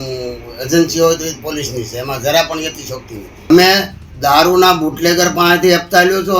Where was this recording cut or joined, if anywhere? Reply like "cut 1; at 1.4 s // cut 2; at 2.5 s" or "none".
cut 1; at 3.5 s